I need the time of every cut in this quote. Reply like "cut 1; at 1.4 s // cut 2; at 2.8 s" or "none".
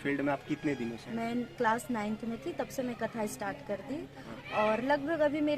cut 1; at 1.0 s